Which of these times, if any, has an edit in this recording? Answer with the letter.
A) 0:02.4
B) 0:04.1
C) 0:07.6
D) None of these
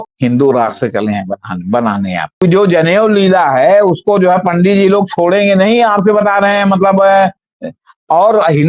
A